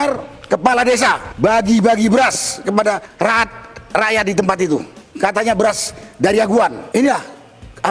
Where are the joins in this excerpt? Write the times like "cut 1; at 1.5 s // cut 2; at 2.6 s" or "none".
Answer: cut 1; at 1.3 s // cut 2; at 3.1 s // cut 3; at 5.0 s // cut 4; at 6.8 s